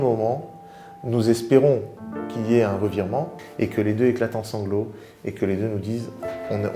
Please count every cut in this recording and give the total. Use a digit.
1